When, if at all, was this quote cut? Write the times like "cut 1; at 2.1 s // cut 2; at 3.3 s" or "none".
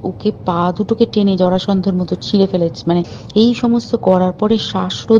cut 1; at 3.2 s